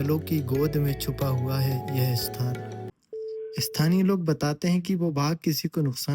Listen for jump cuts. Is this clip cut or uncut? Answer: cut